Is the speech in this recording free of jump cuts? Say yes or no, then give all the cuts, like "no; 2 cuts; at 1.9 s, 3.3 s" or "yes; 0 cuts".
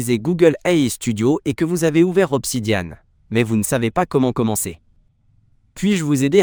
yes; 0 cuts